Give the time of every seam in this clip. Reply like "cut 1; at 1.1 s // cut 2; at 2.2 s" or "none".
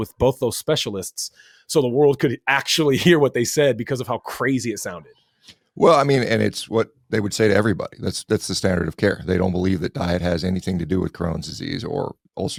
none